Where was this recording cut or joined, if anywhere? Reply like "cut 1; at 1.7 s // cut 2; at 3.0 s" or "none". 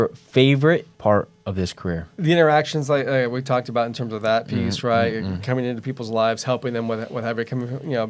cut 1; at 0.9 s // cut 2; at 2.1 s